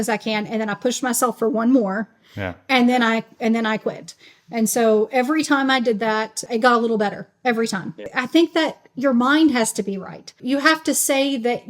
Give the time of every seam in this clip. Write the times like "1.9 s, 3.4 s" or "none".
6.4 s, 8.1 s, 10.4 s